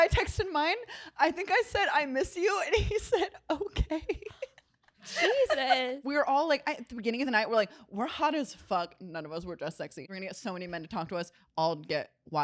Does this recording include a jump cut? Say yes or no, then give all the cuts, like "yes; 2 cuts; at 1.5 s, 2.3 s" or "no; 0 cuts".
yes; 2 cuts; at 6.0 s, 10.1 s